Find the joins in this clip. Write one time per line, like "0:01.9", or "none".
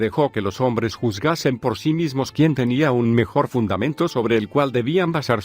0:02.4